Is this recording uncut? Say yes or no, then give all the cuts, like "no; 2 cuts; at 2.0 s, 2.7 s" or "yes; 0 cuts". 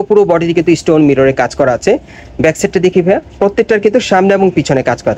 yes; 0 cuts